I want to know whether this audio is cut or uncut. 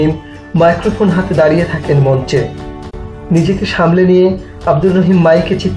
cut